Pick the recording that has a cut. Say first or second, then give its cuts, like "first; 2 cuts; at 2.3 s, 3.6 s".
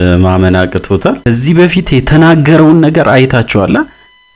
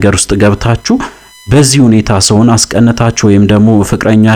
first; 1 cut; at 1.2 s